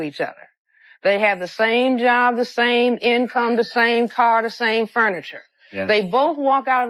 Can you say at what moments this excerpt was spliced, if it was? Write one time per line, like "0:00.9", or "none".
none